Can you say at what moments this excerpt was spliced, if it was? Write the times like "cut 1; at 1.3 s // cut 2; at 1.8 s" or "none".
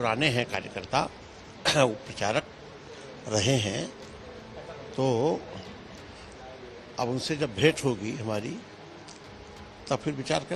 none